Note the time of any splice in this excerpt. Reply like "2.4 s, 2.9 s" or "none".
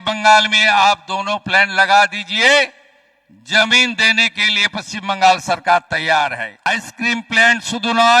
6.7 s